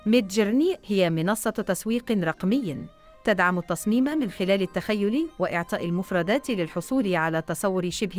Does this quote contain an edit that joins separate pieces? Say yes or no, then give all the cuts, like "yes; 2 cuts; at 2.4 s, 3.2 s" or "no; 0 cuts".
no; 0 cuts